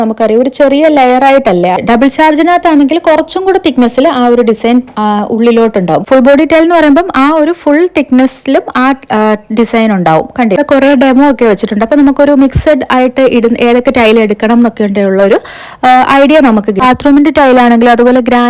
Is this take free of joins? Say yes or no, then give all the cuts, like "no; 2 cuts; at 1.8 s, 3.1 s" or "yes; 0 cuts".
no; 4 cuts; at 1.8 s, 6.0 s, 10.6 s, 16.8 s